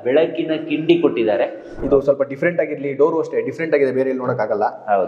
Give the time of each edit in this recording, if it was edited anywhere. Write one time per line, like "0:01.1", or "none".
0:01.7